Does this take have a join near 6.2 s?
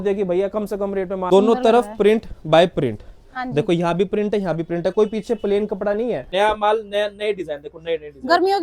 yes; 2 cuts; at 1.2 s, 6.2 s

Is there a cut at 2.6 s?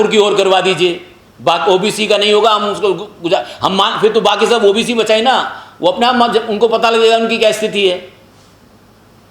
no; 0 cuts

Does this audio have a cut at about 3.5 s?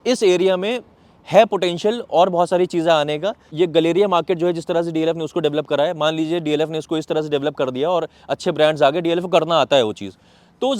yes; 1 cut; at 3.5 s

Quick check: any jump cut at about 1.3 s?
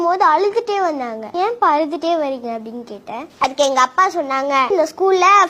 yes; 2 cuts; at 1.3 s, 4.7 s

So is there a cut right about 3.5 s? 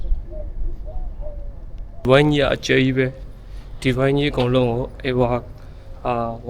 no; 1 cut; at 2.0 s

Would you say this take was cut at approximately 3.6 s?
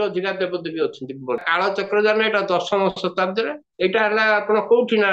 no; 1 cut; at 1.4 s

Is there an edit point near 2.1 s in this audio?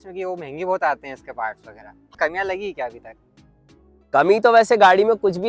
yes; 1 cut; at 2.1 s

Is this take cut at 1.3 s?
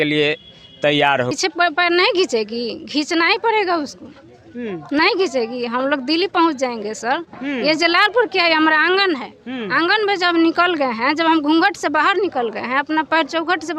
yes; 1 cut; at 1.3 s

